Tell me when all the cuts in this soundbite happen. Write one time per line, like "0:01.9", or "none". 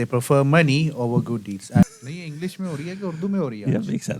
0:01.8